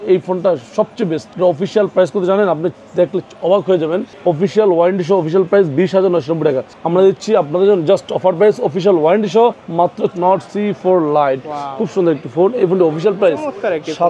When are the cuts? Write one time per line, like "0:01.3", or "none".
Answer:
0:01.3
0:04.1
0:06.7
0:10.1